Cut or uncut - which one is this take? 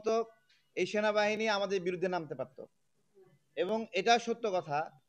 uncut